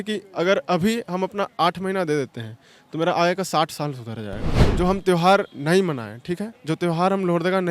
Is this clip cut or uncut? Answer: cut